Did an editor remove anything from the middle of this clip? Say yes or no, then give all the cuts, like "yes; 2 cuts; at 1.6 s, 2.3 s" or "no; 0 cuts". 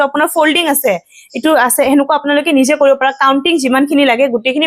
no; 0 cuts